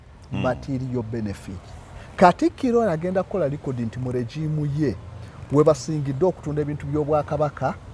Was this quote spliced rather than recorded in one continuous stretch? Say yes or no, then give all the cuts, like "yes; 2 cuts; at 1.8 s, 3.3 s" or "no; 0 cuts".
no; 0 cuts